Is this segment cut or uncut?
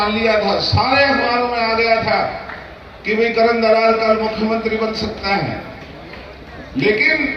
uncut